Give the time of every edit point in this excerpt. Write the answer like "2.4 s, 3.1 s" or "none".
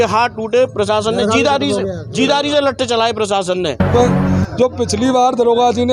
3.9 s